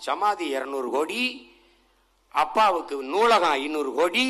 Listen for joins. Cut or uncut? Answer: uncut